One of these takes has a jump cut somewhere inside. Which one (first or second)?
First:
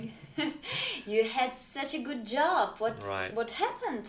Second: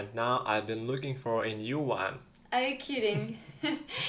second